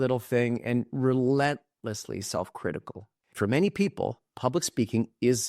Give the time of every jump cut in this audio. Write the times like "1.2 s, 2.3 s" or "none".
3.1 s